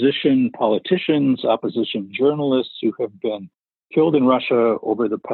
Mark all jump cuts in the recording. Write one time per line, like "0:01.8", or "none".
none